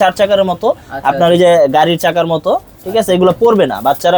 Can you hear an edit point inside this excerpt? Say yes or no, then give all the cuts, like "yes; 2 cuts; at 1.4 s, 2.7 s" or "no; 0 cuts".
no; 0 cuts